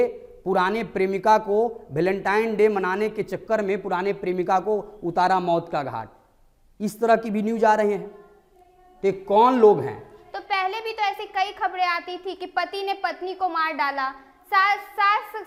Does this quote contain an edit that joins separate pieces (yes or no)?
no